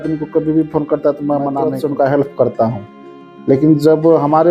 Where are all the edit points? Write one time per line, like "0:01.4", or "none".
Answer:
0:01.6